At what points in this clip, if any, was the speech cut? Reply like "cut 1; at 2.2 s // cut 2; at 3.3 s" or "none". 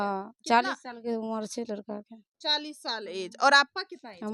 none